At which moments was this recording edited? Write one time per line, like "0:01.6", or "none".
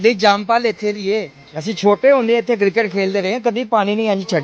none